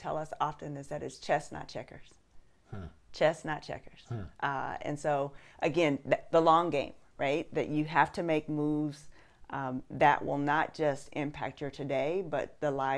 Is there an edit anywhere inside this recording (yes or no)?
no